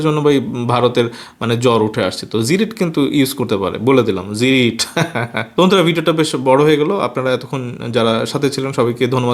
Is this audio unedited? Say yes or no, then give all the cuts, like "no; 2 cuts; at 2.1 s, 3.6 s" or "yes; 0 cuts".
yes; 0 cuts